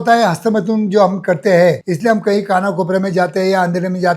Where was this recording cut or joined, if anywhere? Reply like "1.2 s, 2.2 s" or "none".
1.9 s